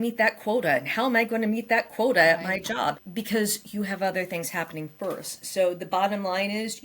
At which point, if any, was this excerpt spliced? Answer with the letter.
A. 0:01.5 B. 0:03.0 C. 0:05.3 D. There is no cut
B